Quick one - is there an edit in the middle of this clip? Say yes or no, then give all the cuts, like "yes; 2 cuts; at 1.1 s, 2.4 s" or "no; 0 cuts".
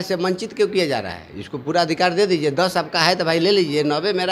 no; 0 cuts